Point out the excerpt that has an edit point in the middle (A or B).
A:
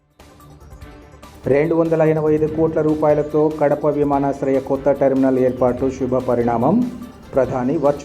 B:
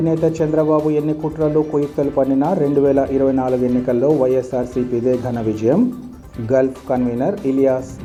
A